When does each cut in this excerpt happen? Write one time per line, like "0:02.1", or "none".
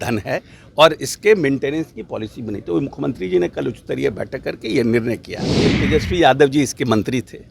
0:05.8